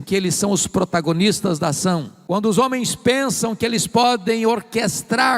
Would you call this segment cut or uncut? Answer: cut